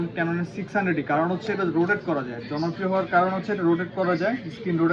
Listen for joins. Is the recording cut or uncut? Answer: uncut